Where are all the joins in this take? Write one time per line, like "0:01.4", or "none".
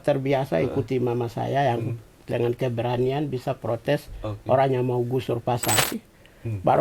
0:05.8